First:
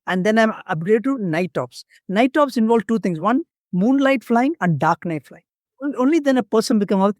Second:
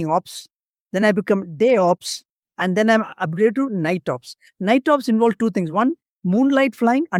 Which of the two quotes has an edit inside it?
first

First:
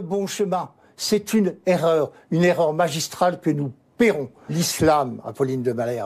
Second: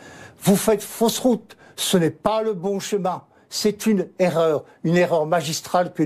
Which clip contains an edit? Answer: first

